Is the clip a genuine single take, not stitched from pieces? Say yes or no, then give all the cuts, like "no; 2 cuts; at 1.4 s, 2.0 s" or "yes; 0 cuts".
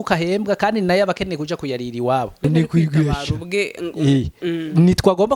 no; 1 cut; at 2.4 s